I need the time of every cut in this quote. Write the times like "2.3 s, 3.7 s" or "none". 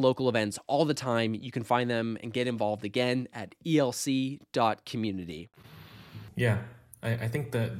none